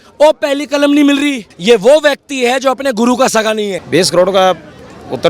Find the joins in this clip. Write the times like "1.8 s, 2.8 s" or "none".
1.5 s, 3.8 s